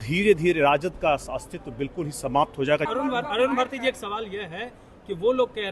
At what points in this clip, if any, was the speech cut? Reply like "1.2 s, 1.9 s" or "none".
2.9 s